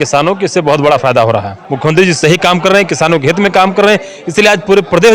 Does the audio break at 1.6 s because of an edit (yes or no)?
yes